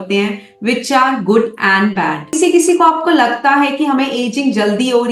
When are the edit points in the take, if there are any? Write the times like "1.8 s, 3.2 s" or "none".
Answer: 2.4 s